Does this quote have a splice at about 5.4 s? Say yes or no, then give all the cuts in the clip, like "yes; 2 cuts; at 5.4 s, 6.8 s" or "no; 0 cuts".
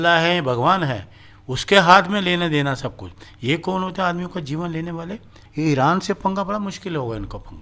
yes; 1 cut; at 5.4 s